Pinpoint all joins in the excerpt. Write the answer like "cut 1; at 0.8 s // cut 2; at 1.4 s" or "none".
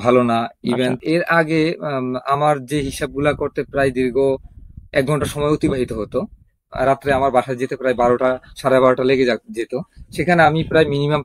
cut 1; at 1.0 s // cut 2; at 6.6 s